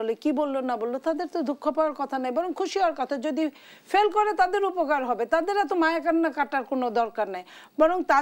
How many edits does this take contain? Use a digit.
0